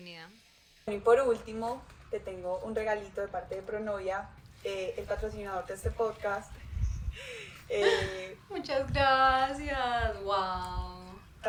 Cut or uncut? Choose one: uncut